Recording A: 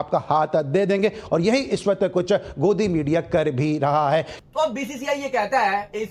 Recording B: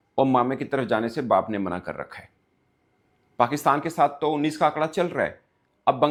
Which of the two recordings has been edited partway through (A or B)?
A